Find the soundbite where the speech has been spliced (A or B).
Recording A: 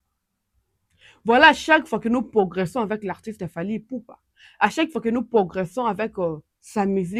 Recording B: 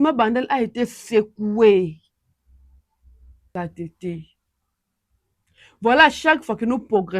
B